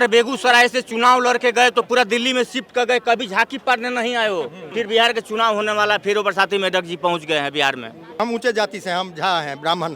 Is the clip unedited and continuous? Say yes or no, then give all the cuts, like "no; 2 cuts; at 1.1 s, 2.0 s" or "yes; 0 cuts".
no; 2 cuts; at 4.6 s, 8.2 s